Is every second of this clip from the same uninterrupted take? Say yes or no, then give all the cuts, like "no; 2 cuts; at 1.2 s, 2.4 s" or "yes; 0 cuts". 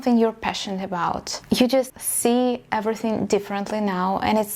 no; 2 cuts; at 1.4 s, 2.0 s